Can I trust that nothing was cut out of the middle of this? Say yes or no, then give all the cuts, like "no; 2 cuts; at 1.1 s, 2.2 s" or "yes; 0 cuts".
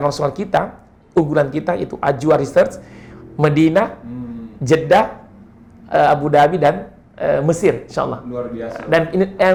yes; 0 cuts